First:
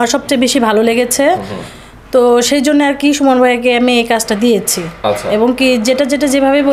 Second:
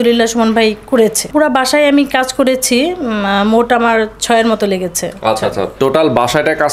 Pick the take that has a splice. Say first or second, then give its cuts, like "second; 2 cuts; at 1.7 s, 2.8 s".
second; 1 cut; at 1.3 s